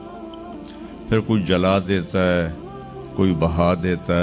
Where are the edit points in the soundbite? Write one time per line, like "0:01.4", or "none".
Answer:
none